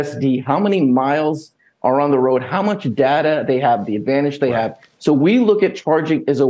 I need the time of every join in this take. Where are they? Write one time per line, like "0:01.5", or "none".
0:04.8